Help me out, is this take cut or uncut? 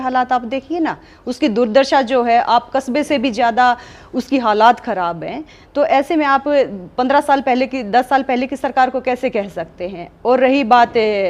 uncut